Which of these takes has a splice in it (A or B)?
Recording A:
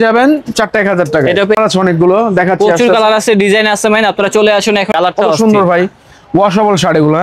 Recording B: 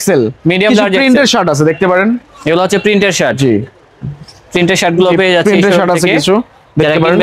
A